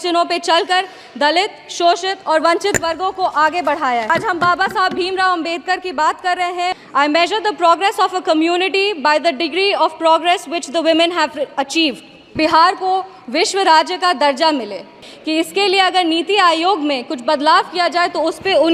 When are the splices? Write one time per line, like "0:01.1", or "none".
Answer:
0:04.1
0:06.7
0:12.3
0:15.0